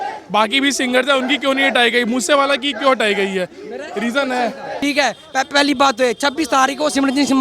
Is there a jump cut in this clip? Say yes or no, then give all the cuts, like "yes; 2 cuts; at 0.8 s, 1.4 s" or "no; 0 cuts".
yes; 1 cut; at 4.7 s